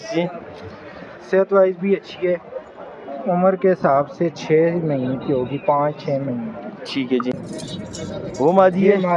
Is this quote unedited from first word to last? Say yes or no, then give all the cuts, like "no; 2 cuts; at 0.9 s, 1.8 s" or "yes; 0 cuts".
no; 1 cut; at 7.3 s